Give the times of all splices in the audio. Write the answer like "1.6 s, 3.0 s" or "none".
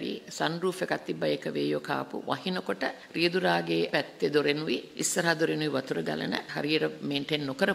3.0 s, 3.9 s, 4.9 s, 6.5 s